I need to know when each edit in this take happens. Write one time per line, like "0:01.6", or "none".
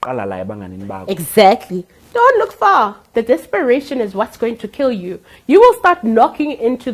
0:03.1